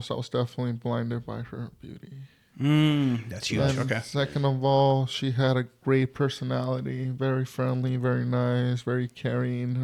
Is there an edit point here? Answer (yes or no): no